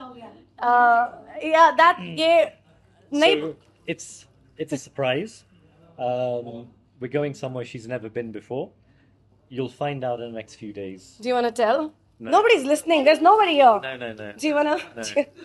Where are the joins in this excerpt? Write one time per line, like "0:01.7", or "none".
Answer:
none